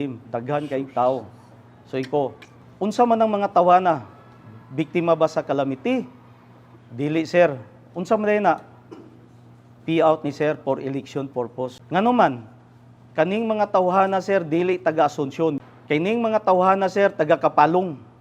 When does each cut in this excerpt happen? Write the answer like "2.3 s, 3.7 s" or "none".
11.8 s, 15.6 s